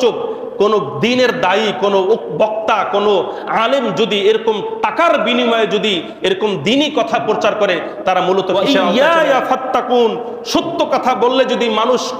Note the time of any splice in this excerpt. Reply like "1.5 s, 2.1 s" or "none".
8.5 s